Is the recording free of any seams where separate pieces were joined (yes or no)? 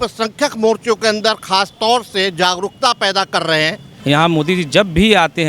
no